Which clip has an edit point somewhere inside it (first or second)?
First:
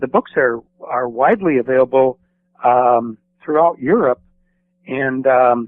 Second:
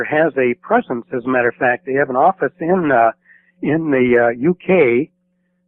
first